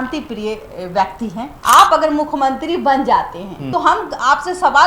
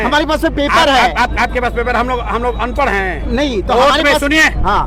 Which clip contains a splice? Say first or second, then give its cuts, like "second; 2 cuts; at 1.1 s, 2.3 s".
first; 2 cuts; at 1.5 s, 3.6 s